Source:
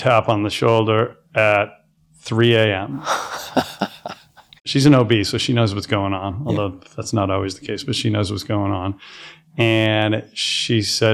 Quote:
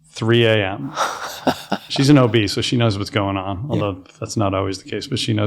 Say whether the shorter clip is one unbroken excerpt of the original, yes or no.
no